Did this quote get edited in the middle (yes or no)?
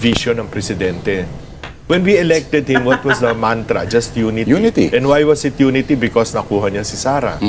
no